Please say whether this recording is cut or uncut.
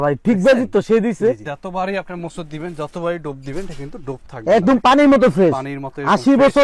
cut